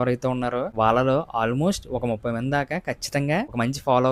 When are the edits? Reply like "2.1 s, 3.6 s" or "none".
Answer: none